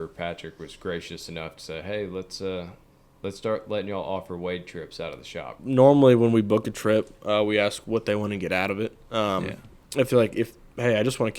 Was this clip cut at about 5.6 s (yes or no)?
yes